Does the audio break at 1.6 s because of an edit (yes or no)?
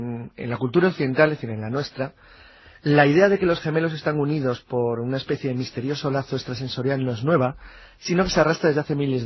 yes